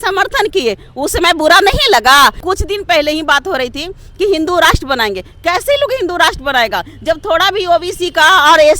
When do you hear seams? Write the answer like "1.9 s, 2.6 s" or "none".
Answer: 2.4 s